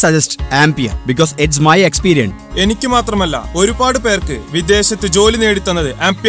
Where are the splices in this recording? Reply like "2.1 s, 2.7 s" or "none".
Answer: 2.4 s